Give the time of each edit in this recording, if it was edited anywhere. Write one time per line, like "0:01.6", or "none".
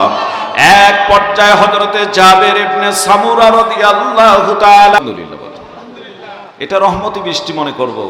0:05.0